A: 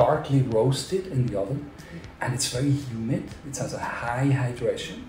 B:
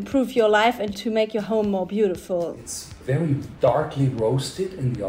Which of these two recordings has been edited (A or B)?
B